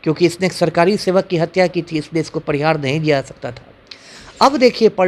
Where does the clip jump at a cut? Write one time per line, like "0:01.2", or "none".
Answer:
none